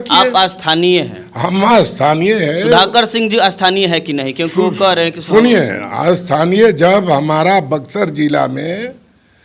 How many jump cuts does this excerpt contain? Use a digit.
0